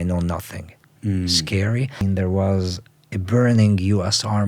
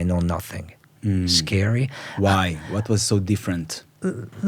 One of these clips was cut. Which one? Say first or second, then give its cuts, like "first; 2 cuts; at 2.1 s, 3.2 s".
first; 1 cut; at 2.0 s